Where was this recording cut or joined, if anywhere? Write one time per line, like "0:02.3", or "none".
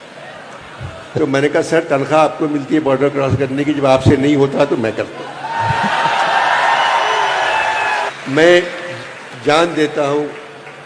0:08.1